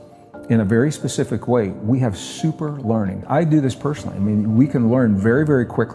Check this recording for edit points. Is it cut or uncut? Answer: cut